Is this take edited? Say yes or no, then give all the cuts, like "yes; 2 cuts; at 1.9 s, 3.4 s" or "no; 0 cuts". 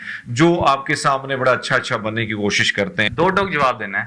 yes; 1 cut; at 3.1 s